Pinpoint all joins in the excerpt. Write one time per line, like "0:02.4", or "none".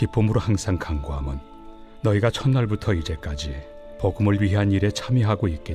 none